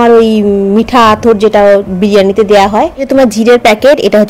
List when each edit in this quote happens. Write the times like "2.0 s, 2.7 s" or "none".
none